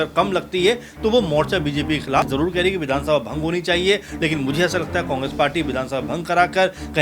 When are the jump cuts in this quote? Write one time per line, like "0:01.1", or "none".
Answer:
0:02.2